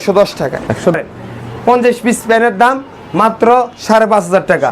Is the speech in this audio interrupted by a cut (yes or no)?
yes